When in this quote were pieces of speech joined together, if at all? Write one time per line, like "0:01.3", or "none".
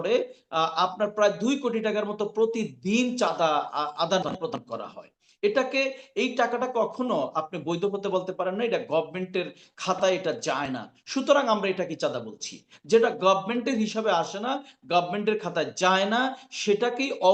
none